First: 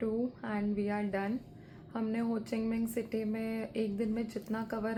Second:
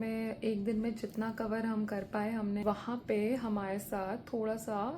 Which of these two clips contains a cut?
second; 1 cut; at 2.6 s

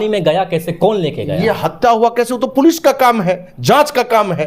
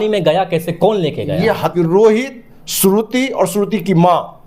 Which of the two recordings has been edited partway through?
second; 1 cut; at 1.7 s

